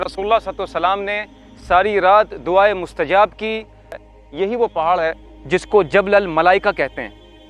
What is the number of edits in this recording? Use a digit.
1